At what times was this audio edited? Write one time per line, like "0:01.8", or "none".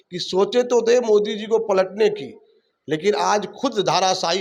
none